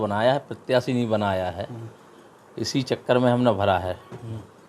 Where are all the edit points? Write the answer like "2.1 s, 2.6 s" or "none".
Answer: none